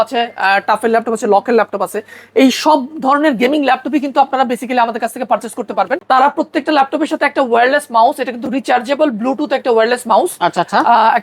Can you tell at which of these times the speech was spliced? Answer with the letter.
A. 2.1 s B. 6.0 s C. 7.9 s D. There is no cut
B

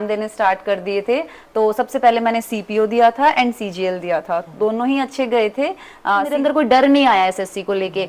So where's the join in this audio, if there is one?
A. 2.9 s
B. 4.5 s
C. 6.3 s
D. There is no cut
C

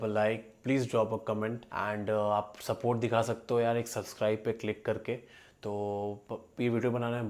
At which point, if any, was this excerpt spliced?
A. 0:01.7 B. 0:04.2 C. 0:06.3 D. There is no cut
A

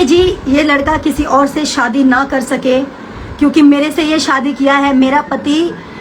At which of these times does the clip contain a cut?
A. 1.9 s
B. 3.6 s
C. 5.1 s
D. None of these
D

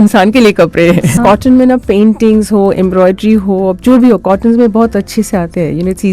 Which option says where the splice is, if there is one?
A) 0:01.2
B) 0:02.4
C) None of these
A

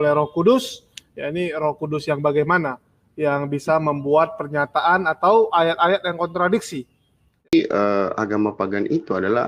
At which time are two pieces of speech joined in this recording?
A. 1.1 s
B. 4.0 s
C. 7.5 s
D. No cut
C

